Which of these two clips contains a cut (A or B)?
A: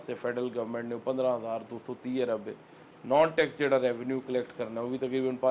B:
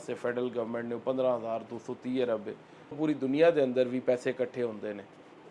B